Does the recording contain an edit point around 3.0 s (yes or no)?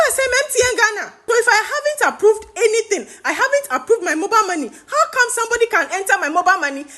no